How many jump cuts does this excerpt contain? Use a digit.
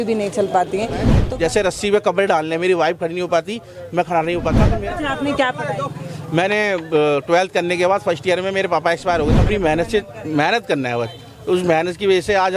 3